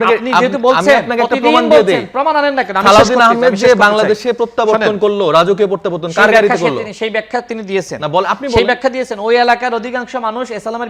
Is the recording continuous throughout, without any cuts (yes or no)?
yes